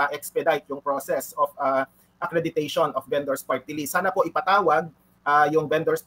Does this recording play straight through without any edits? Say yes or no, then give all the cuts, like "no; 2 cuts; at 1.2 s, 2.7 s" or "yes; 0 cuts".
yes; 0 cuts